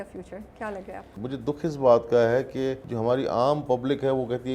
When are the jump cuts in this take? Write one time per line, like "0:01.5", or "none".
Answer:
0:01.1
0:02.9